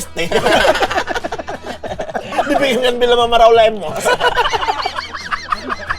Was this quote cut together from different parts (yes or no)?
yes